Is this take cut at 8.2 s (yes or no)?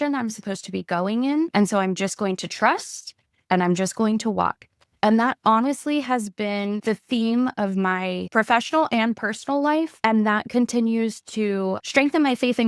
yes